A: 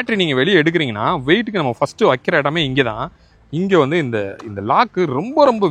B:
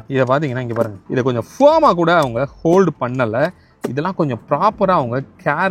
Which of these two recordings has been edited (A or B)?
B